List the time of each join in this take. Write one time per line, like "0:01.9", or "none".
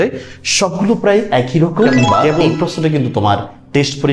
0:02.5